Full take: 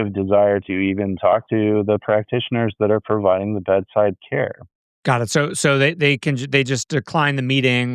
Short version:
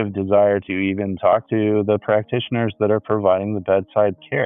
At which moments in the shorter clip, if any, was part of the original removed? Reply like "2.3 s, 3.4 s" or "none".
none